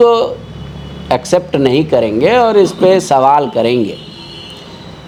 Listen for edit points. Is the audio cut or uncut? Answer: uncut